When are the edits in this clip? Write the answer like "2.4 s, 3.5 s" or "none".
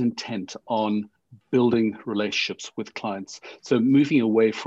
none